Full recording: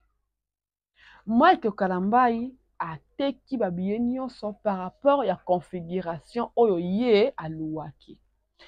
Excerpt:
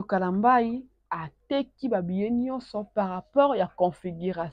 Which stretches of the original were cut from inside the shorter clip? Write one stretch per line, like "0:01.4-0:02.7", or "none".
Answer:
none